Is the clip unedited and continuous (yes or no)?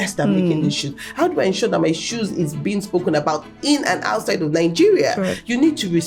yes